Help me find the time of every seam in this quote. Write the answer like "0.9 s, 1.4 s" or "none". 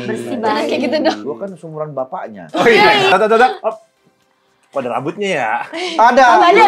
1.2 s, 3.1 s